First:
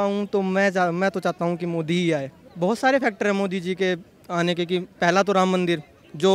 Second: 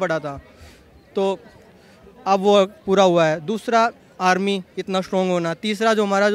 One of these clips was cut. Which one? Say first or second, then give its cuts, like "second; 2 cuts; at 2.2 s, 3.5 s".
first; 1 cut; at 2.4 s